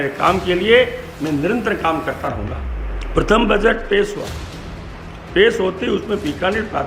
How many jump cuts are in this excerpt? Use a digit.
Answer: 1